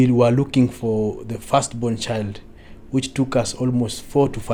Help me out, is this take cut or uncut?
uncut